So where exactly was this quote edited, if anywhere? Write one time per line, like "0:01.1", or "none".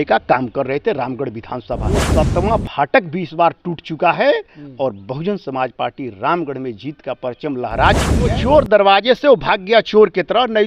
0:02.1
0:08.4